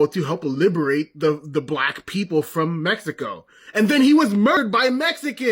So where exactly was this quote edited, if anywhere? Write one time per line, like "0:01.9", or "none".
0:04.6